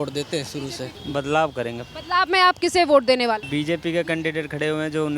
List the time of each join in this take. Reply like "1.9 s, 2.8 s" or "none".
0.9 s, 3.4 s